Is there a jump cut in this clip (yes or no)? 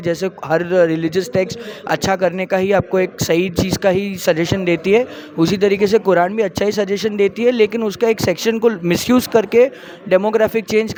no